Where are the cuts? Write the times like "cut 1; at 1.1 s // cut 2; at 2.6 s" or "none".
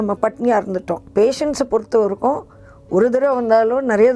cut 1; at 1.0 s

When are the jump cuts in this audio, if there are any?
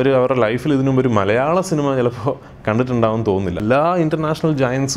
cut 1; at 3.6 s

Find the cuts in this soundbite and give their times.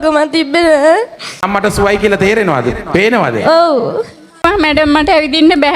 cut 1; at 1.4 s // cut 2; at 4.4 s

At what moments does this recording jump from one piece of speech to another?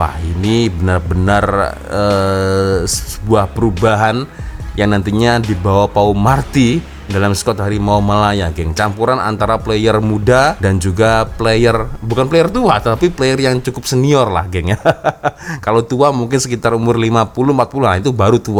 none

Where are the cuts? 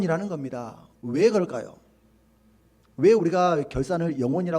none

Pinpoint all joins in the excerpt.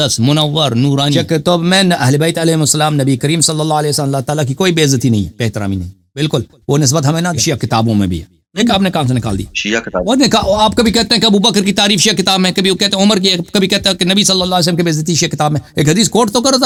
none

